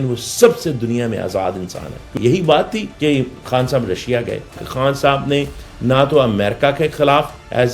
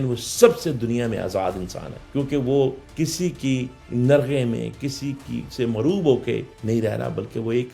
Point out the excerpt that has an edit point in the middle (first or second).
first